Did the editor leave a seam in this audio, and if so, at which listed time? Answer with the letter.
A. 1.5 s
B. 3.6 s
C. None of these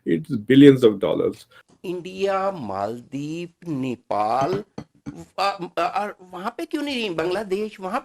A